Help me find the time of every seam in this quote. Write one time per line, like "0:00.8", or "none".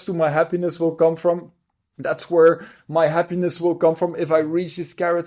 none